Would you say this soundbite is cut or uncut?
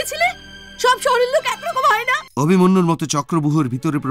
cut